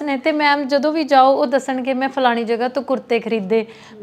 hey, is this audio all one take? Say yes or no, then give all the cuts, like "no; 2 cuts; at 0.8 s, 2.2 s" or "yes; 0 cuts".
yes; 0 cuts